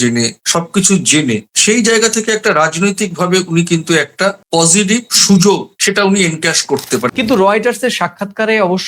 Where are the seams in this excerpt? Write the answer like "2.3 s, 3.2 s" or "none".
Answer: 5.7 s, 7.1 s